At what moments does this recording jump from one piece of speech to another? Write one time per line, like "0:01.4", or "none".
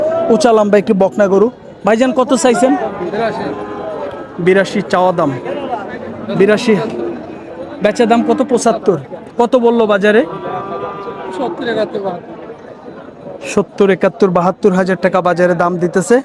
none